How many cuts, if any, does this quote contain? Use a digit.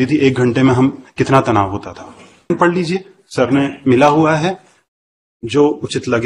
1